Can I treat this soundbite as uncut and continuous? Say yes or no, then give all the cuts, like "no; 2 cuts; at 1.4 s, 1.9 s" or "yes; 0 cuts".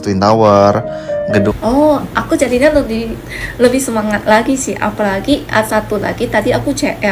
no; 1 cut; at 1.5 s